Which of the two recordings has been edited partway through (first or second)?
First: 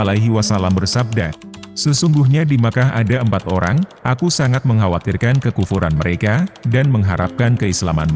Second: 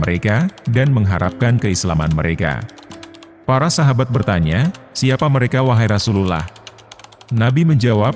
first